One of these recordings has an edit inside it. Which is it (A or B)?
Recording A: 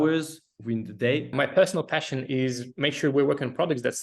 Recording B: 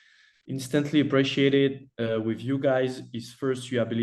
A